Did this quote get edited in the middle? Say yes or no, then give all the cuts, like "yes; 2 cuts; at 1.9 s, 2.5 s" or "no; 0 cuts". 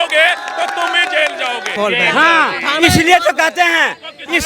yes; 1 cut; at 1.7 s